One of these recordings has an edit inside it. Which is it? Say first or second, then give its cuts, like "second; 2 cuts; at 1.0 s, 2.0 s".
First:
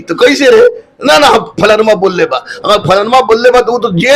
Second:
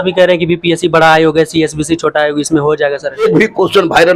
second; 1 cut; at 3.2 s